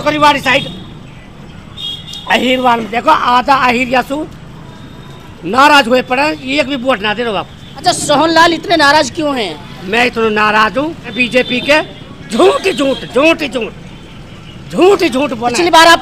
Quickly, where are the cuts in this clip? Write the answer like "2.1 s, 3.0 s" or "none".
none